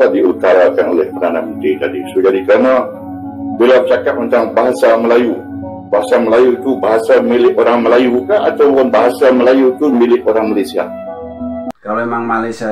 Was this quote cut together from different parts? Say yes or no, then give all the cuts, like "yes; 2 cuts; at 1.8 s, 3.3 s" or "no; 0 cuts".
yes; 1 cut; at 11.7 s